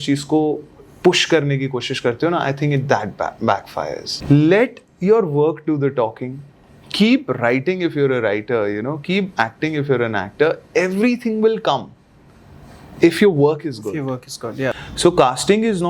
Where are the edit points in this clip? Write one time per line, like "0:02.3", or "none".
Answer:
0:04.1
0:14.8